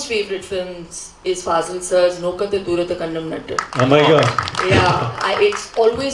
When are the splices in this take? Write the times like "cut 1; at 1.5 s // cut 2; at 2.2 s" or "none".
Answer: none